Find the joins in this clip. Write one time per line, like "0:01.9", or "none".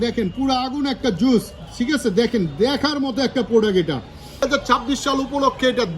0:04.4